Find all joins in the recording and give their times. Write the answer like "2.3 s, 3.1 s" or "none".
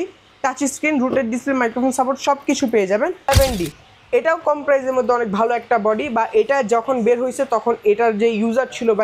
3.3 s

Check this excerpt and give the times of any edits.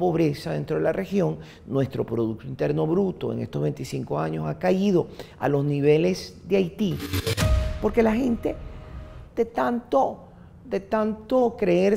7.5 s

